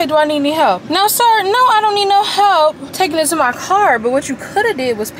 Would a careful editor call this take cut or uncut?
uncut